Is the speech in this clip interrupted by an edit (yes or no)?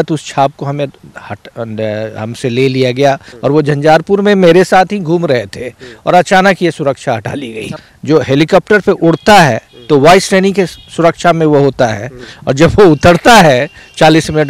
yes